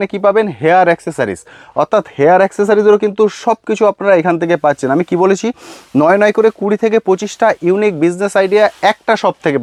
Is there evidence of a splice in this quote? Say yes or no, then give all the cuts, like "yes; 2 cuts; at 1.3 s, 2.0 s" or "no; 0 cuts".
no; 0 cuts